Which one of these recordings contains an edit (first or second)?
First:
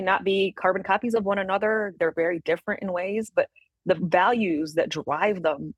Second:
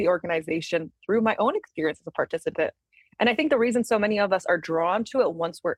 first